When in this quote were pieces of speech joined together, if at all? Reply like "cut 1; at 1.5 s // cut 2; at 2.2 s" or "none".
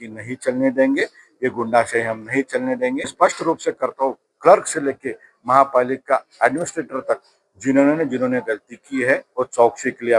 cut 1; at 3.1 s